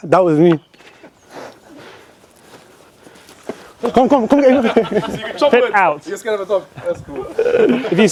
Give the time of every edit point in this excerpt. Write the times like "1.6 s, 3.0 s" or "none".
none